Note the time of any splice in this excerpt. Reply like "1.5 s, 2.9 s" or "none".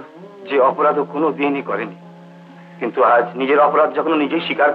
none

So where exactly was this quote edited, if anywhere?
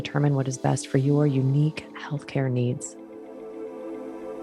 2.9 s

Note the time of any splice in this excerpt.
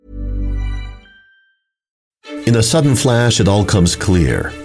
2.2 s

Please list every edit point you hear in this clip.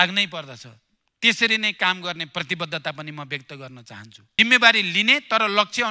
4.2 s

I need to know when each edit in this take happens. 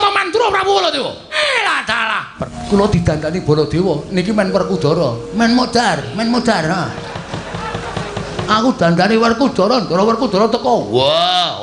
1.3 s, 2.6 s

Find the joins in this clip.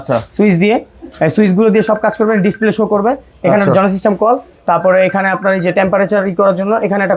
none

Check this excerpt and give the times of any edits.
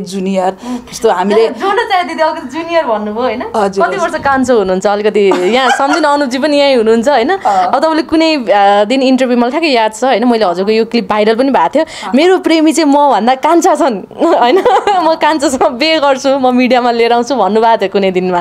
none

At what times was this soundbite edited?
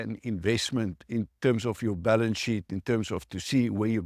none

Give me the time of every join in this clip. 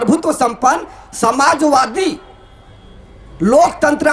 none

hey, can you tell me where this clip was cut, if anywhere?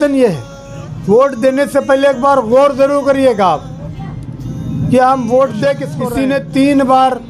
5.9 s

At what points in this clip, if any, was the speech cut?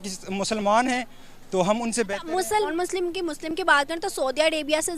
2.7 s

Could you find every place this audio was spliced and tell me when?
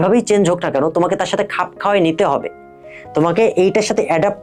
none

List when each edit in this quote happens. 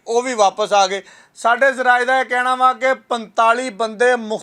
none

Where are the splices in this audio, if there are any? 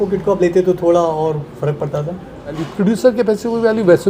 2.7 s

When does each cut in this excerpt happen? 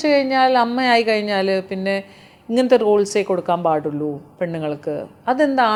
none

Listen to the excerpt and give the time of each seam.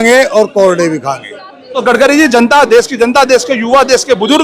1.7 s

